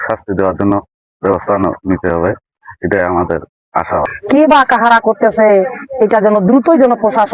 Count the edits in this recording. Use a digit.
1